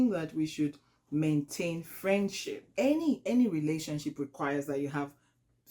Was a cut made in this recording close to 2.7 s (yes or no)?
yes